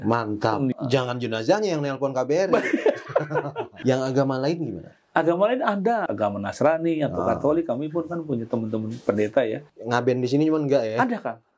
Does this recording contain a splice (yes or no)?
yes